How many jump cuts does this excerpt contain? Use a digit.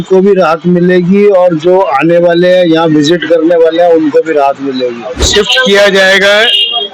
1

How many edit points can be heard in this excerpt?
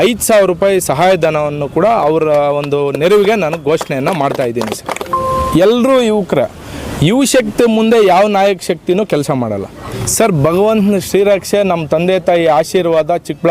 2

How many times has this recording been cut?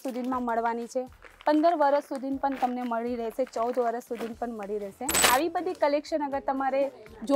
1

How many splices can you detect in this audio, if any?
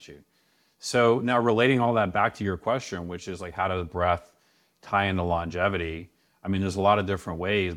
0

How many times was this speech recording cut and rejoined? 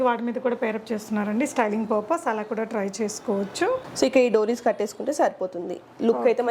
0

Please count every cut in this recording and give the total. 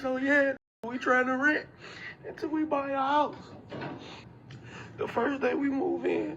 1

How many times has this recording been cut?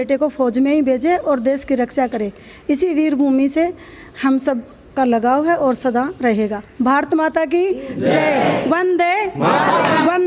0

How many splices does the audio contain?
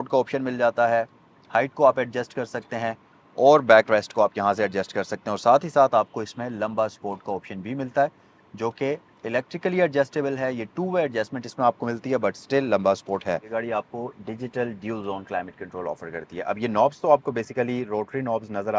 1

